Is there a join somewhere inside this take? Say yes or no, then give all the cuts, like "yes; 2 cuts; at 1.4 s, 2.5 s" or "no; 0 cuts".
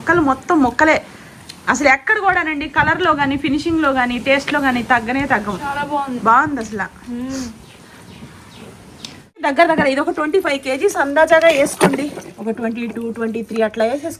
yes; 1 cut; at 9.4 s